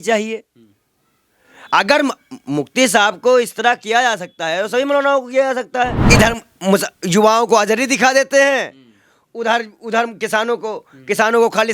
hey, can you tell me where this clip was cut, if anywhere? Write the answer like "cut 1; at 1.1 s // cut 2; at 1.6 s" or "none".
cut 1; at 6.0 s